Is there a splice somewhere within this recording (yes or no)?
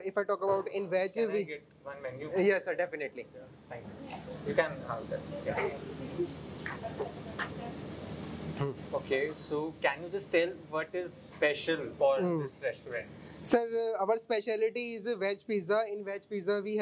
no